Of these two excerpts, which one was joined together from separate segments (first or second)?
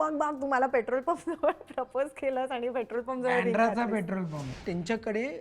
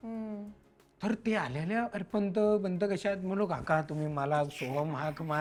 first